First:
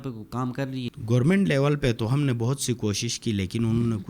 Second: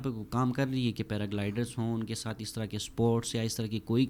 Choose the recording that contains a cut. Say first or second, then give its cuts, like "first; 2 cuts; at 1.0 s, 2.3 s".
first; 1 cut; at 1.0 s